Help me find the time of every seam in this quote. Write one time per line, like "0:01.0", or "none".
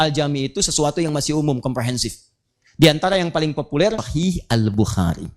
0:04.1